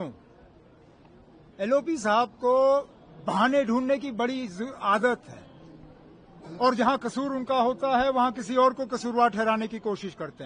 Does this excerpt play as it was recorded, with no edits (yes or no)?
yes